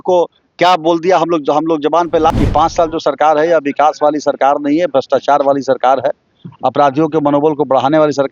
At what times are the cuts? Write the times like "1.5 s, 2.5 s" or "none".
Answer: 2.3 s

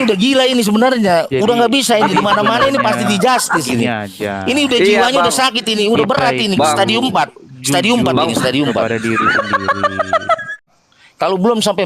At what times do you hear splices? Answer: 10.8 s

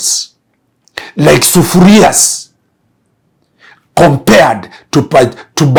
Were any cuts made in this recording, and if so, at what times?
none

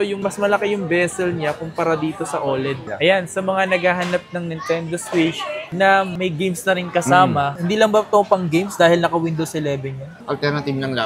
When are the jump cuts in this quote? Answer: 2.8 s, 7.5 s, 10.1 s

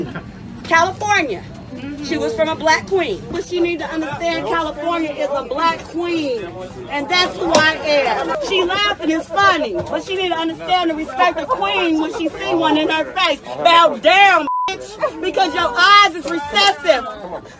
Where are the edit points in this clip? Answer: 3.3 s, 8.4 s

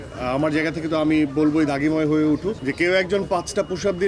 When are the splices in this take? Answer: 2.6 s

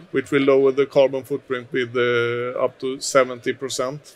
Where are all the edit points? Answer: none

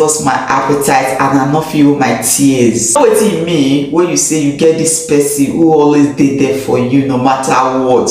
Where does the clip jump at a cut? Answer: 3.0 s

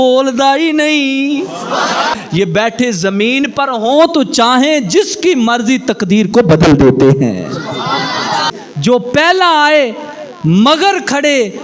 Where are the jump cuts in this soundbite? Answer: 2.2 s, 8.5 s

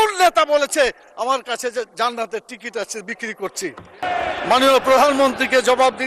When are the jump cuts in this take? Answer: 4.0 s

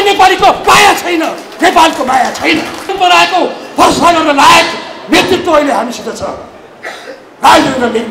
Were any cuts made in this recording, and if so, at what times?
2.9 s

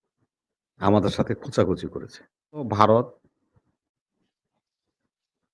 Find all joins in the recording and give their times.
2.7 s

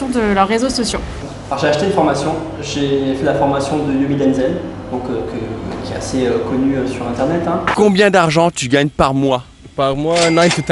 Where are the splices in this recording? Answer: 1.3 s, 7.7 s

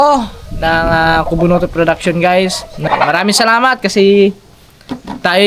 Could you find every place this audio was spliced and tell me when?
2.9 s

